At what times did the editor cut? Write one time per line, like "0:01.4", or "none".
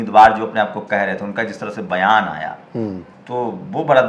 0:03.1